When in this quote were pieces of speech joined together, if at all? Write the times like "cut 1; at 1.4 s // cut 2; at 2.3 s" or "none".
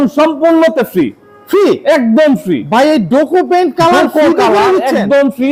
none